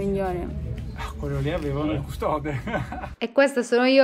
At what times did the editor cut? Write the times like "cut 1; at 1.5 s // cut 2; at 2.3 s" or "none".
cut 1; at 3.0 s